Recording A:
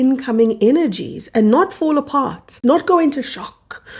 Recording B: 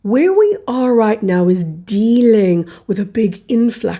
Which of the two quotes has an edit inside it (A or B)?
A